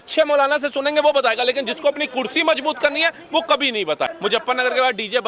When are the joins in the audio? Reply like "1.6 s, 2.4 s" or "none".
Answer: 4.1 s

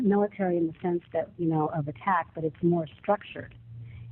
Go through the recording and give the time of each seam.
1.5 s

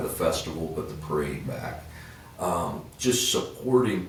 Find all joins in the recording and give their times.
none

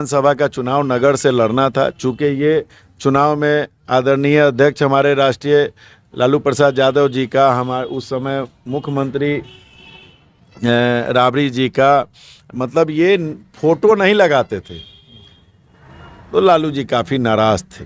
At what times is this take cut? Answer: none

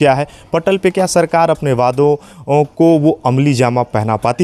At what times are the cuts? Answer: none

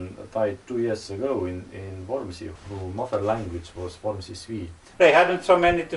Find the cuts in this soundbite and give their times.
2.4 s, 4.8 s

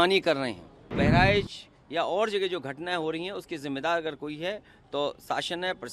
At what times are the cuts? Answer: 0.9 s

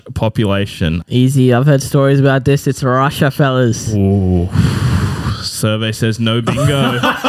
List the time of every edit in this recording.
1.0 s

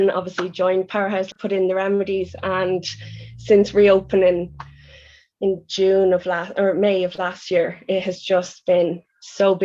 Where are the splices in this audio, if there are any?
1.3 s

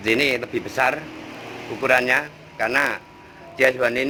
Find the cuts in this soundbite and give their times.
none

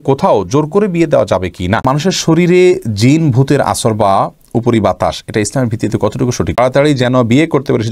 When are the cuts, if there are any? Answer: 1.8 s, 6.6 s

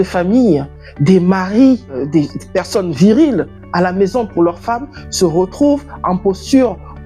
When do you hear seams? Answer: 2.1 s

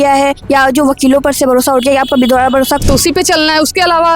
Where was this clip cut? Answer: 2.8 s

